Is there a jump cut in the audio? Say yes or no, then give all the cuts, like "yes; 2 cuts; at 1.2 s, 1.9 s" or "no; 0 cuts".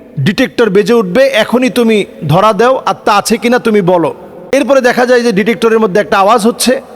yes; 1 cut; at 4.3 s